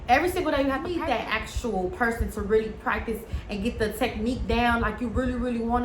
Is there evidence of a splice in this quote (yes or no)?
yes